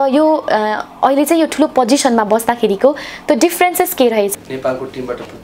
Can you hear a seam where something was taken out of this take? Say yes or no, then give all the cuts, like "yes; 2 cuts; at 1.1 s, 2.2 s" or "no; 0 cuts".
yes; 1 cut; at 4.3 s